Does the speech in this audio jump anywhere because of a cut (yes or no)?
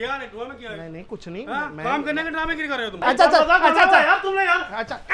yes